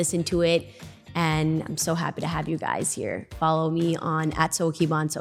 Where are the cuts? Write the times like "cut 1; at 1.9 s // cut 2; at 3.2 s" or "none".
none